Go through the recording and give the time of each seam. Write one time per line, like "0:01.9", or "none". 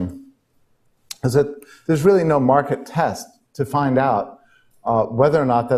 none